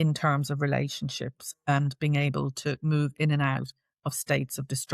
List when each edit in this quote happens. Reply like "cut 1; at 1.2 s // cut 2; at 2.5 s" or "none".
none